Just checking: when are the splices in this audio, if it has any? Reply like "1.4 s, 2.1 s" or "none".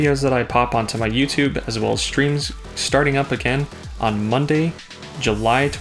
none